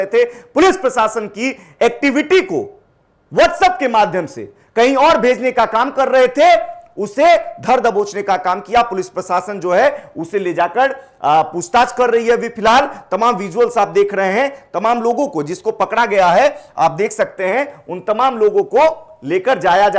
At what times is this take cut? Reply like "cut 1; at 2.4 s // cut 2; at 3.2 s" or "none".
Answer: none